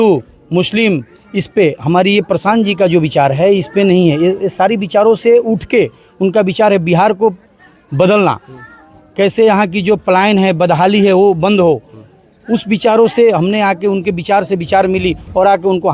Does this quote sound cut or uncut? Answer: uncut